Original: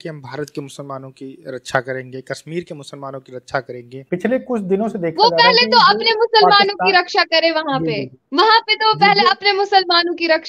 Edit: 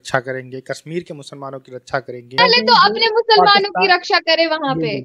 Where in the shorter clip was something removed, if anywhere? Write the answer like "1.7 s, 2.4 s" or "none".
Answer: 2.4 s